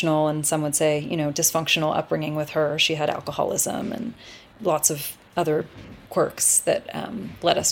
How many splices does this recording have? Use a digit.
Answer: 2